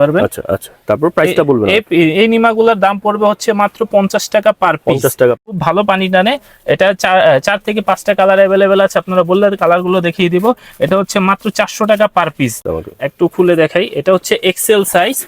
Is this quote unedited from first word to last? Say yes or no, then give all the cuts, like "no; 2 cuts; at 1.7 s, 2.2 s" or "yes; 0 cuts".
no; 2 cuts; at 5.5 s, 12.6 s